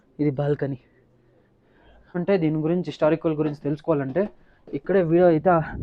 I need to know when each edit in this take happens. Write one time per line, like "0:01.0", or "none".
0:02.2